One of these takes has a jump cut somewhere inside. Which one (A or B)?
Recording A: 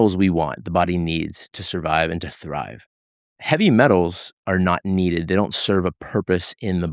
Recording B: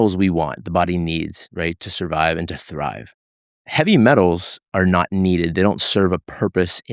A